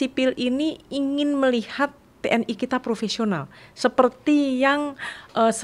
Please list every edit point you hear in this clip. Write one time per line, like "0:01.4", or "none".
none